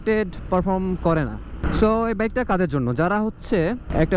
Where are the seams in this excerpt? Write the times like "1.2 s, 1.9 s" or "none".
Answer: 1.6 s

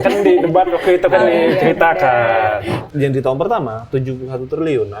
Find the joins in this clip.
2.8 s

